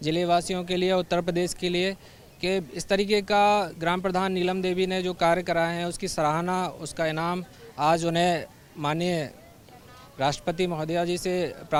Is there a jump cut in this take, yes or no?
no